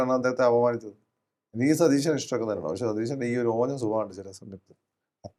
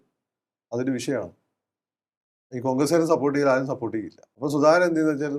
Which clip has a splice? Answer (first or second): second